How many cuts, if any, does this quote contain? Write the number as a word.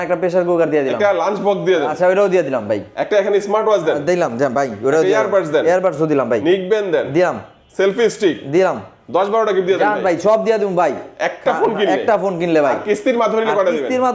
zero